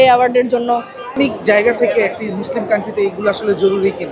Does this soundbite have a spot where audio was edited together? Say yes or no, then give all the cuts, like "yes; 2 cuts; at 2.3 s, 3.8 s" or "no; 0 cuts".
no; 0 cuts